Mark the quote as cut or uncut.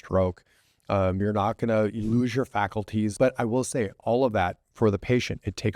cut